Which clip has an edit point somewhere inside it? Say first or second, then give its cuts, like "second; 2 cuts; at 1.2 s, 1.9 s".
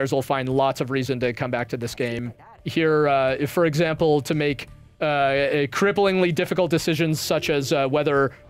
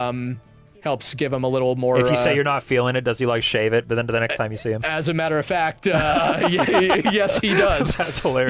first; 1 cut; at 2.2 s